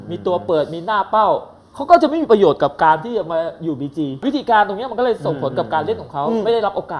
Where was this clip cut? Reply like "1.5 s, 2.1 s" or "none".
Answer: 4.2 s